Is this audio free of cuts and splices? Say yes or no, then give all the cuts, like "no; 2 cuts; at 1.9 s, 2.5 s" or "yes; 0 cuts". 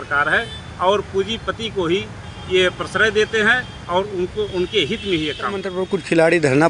yes; 0 cuts